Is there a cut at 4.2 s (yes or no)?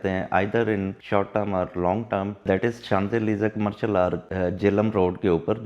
yes